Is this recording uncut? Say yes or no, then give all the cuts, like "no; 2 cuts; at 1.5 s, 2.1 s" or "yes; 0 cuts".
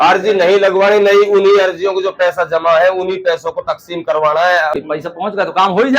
no; 1 cut; at 4.8 s